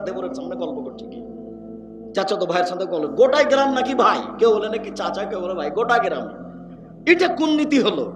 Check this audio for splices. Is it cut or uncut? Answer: uncut